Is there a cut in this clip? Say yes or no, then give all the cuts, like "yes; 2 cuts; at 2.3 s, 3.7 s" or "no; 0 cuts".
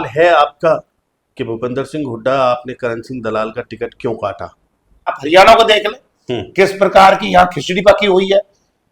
yes; 1 cut; at 5.2 s